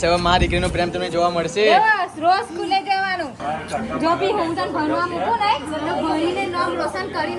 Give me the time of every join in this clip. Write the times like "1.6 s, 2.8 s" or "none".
3.4 s